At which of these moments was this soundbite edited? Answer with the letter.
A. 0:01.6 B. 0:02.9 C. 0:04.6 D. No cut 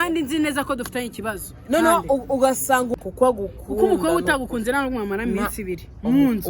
B